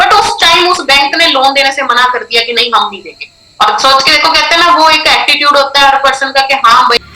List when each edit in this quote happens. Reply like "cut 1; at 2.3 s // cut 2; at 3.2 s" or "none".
none